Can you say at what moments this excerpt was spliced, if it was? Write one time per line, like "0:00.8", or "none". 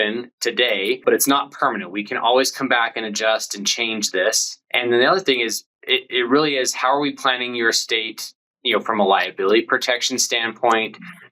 0:01.0
0:04.5